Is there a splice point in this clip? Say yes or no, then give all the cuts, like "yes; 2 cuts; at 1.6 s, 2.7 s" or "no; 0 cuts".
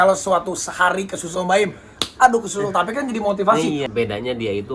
yes; 1 cut; at 3.8 s